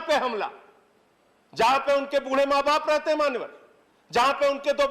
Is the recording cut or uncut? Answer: uncut